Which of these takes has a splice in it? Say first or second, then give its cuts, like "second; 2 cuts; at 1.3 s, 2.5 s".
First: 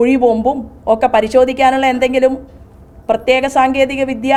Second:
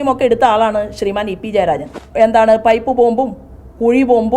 second; 1 cut; at 2.0 s